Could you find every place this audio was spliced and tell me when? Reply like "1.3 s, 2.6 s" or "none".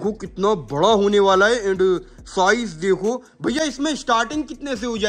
none